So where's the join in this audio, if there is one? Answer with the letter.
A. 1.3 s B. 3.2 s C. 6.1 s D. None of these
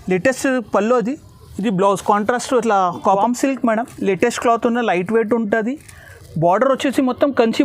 B